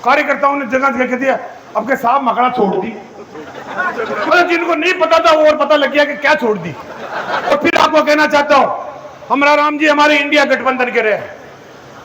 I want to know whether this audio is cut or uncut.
cut